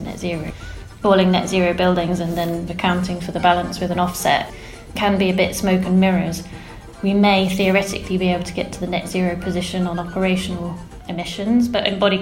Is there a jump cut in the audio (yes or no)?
yes